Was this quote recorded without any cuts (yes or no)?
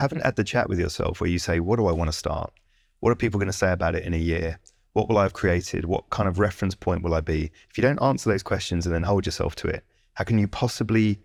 yes